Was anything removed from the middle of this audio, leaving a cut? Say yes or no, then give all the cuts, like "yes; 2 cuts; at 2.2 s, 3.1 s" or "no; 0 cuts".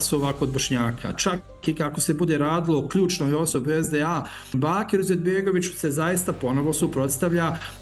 yes; 2 cuts; at 1.1 s, 4.5 s